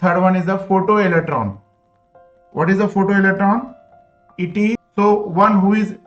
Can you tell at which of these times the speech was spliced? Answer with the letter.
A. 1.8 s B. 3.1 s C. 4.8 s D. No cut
C